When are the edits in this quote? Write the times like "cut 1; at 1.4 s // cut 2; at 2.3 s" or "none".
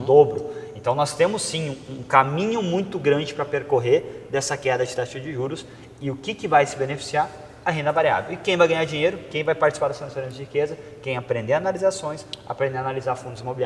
none